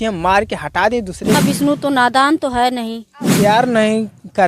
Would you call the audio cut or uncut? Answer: cut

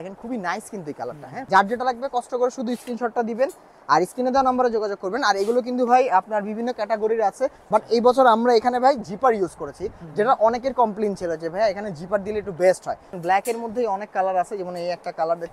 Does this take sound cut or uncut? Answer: cut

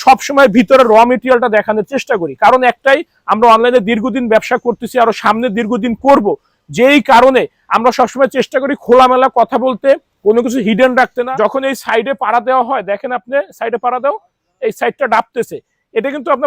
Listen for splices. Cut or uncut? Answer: cut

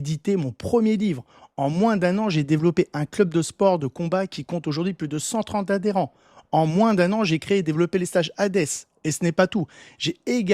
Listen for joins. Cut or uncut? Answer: uncut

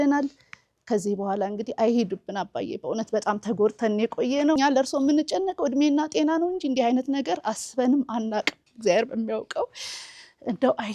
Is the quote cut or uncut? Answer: cut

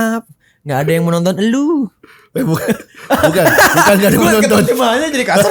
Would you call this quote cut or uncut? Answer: uncut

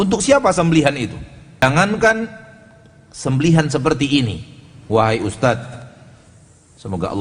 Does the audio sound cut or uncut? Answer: cut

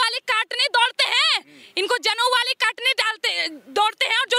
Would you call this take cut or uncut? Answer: uncut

